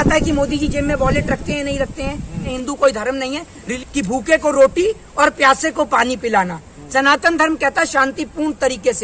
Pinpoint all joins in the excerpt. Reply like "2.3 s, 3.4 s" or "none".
2.5 s, 3.7 s